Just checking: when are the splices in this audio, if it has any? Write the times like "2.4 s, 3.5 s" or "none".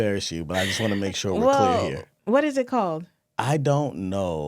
2.1 s